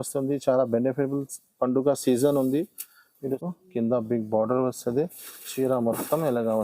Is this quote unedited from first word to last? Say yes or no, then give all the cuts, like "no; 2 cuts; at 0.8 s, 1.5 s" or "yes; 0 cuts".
no; 1 cut; at 3.2 s